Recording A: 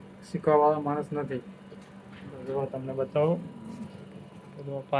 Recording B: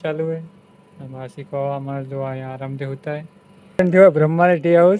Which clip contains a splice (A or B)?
B